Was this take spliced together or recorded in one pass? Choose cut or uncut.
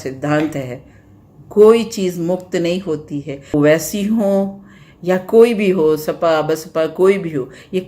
cut